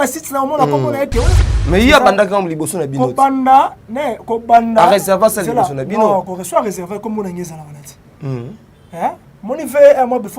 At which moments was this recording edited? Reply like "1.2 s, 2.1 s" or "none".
1.4 s